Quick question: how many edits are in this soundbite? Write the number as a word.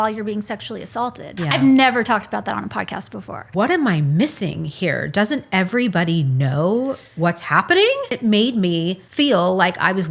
four